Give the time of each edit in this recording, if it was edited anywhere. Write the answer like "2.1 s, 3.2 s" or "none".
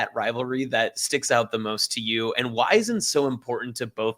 none